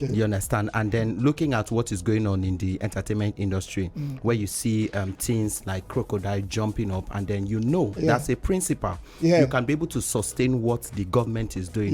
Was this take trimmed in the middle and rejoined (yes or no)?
no